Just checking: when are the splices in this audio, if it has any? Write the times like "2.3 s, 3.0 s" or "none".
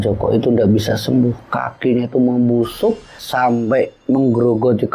none